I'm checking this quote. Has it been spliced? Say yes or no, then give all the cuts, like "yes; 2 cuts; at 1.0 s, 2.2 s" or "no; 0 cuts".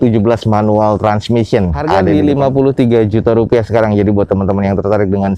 yes; 1 cut; at 1.9 s